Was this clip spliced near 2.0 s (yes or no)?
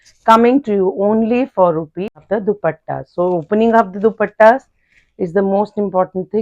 yes